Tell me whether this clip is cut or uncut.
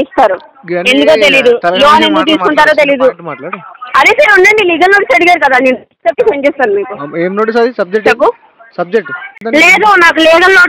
cut